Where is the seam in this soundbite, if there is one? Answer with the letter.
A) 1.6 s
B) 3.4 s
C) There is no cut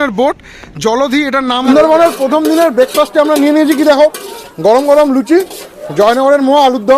A